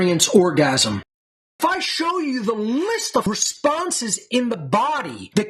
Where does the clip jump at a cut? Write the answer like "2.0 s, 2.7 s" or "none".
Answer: 0.9 s, 3.3 s